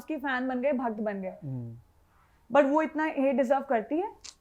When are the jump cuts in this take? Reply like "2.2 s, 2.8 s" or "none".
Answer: none